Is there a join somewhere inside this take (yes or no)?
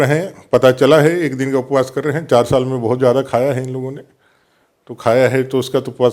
no